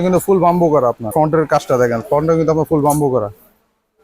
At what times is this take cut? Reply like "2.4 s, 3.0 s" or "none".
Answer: 1.1 s